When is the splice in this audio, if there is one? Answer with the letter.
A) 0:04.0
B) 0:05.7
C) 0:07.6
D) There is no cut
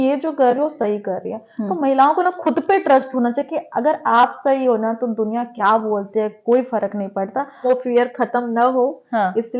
C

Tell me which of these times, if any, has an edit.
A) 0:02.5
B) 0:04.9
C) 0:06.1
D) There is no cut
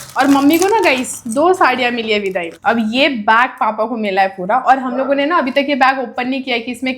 A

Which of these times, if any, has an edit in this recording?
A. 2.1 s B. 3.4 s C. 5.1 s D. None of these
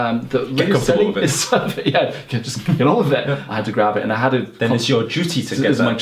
B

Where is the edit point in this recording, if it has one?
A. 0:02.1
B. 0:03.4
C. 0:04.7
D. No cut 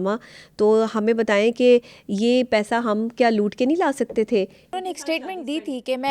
C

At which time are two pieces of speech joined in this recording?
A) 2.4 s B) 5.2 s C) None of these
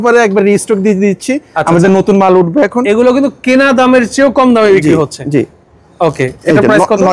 C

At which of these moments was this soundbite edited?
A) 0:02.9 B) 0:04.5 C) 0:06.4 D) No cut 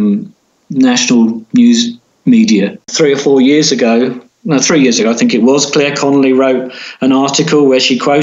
A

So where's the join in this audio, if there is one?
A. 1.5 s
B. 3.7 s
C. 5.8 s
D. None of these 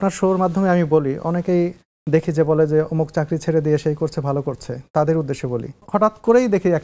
C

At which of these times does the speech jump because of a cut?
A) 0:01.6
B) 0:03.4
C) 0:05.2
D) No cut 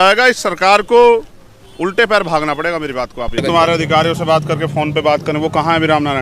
B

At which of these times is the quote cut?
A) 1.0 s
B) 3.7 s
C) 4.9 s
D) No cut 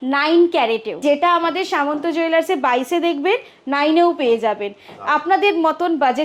A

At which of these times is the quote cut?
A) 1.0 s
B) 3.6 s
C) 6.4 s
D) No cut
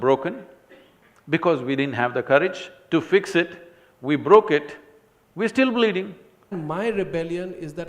C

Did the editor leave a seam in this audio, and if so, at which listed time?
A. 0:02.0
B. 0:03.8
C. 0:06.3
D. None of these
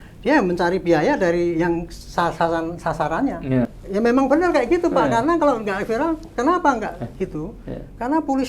B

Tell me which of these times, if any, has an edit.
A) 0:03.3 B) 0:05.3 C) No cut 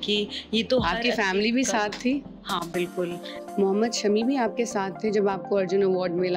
A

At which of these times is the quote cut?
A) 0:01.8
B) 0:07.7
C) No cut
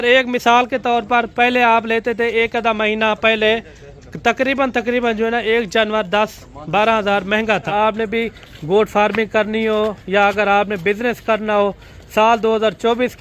B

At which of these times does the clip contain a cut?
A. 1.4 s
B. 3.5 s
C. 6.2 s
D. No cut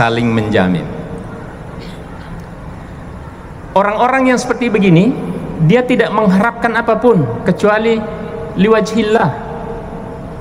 D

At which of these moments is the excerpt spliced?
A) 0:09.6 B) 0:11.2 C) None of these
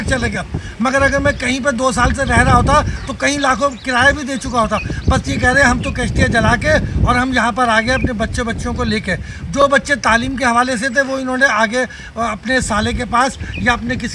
C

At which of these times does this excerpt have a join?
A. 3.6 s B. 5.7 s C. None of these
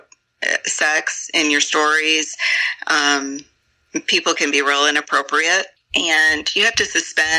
B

